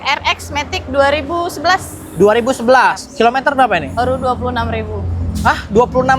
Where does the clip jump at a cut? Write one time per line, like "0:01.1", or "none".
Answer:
none